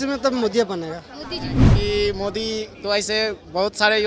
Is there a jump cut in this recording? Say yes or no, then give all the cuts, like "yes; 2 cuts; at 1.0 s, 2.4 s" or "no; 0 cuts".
yes; 1 cut; at 1.7 s